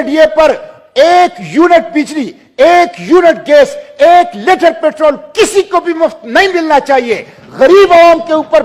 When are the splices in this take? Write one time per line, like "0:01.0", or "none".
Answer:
none